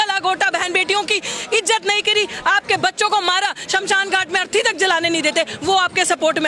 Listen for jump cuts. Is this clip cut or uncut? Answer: uncut